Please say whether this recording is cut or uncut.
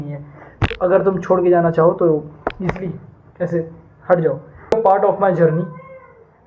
cut